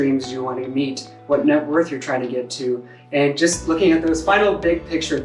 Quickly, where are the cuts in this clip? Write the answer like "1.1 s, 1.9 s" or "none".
1.1 s, 2.9 s, 4.2 s